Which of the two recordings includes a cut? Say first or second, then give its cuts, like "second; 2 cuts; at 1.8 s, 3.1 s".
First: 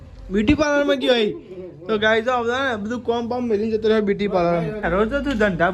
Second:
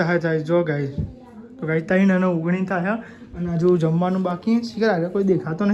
first; 1 cut; at 4.8 s